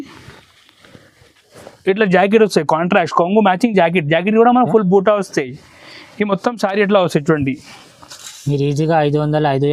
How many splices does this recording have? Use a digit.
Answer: 0